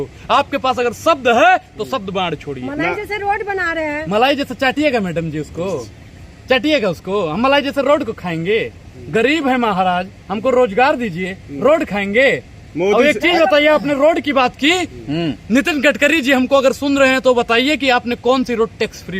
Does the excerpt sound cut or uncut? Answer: uncut